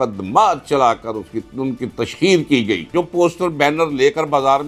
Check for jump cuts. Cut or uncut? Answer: cut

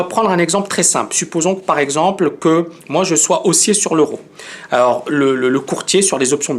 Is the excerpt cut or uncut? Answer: cut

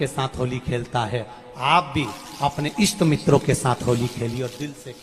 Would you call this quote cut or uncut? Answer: uncut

